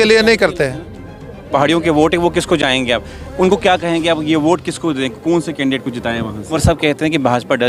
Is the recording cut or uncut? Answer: cut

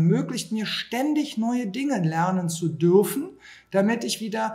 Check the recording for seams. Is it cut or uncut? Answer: uncut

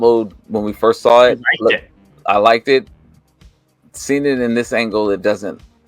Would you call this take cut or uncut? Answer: uncut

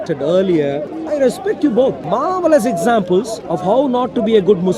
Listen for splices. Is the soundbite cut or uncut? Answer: cut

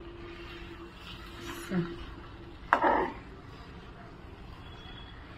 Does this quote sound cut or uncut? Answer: uncut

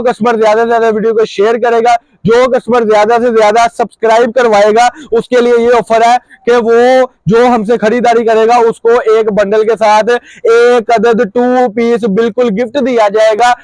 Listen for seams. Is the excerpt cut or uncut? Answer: uncut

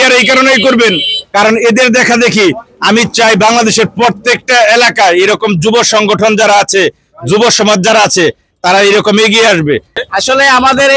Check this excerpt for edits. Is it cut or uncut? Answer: cut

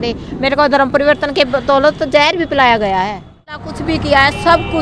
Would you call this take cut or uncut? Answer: cut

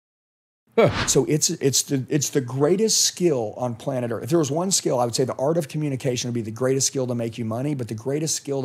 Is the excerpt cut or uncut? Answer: cut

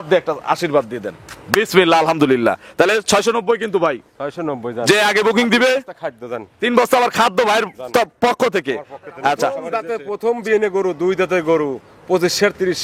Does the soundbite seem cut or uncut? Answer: cut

